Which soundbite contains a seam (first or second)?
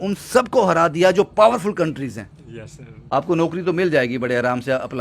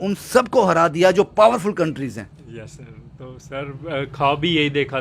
first